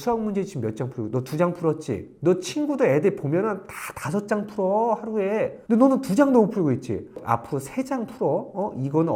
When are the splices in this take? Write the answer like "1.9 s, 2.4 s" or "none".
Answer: none